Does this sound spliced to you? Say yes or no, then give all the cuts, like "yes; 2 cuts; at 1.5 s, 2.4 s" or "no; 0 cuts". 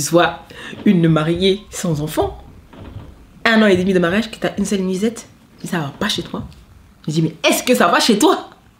no; 0 cuts